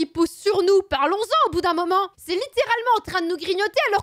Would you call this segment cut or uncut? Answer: uncut